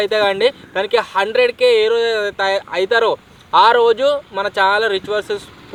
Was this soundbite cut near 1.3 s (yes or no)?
no